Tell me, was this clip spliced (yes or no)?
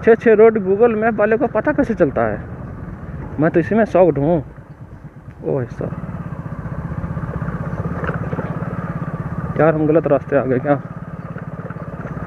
no